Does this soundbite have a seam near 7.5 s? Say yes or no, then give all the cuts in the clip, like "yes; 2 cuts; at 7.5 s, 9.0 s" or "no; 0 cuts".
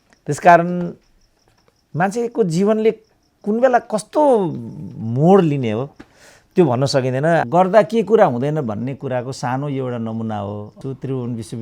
yes; 2 cuts; at 7.5 s, 10.8 s